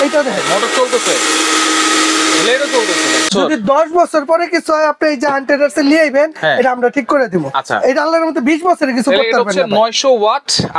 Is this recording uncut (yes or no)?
no